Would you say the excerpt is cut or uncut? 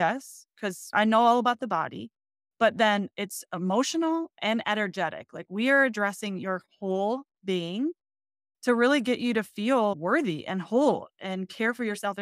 cut